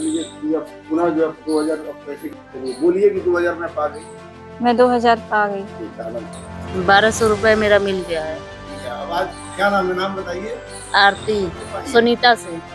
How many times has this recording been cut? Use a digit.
1